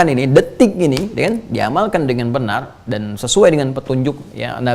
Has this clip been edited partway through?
no; 0 cuts

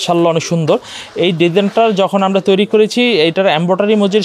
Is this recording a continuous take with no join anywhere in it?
yes; 0 cuts

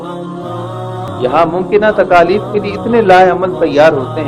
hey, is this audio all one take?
no; 1 cut; at 1.1 s

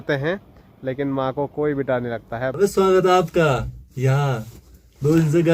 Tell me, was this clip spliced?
yes; 1 cut; at 2.4 s

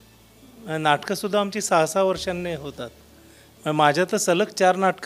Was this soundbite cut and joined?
no; 0 cuts

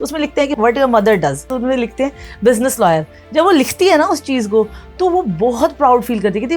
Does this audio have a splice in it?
yes; 2 cuts; at 1.5 s, 3.2 s

